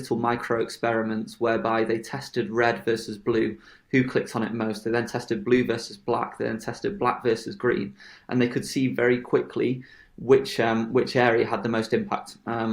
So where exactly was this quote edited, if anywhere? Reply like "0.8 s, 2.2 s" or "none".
none